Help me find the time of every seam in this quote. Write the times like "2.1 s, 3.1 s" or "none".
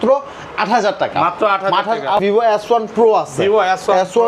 2.2 s